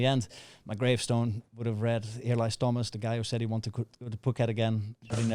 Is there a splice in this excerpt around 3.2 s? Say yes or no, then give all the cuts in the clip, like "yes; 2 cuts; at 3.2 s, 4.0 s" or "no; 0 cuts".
no; 0 cuts